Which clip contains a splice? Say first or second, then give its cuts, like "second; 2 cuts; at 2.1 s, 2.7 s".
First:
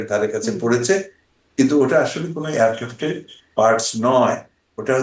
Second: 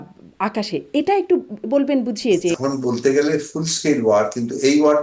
second; 1 cut; at 2.6 s